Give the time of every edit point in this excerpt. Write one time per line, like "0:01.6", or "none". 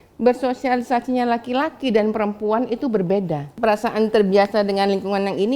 0:03.4